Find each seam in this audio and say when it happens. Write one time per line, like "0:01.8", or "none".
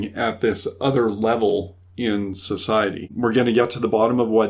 0:03.1